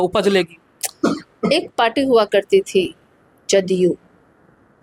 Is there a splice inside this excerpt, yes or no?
no